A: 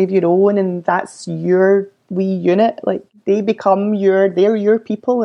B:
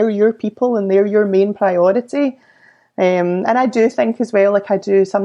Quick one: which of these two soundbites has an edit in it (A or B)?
A